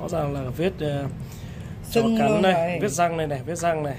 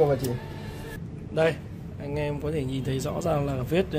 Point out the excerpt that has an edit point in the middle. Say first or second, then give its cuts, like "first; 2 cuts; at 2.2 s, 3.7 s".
second; 1 cut; at 1.0 s